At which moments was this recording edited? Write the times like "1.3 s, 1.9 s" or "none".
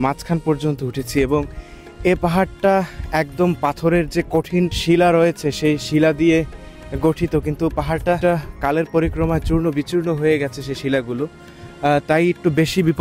4.8 s, 8.2 s